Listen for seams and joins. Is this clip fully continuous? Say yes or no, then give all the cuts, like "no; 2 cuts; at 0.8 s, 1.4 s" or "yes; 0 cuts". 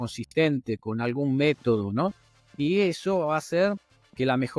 yes; 0 cuts